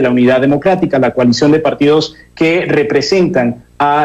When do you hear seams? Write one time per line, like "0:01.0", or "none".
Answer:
none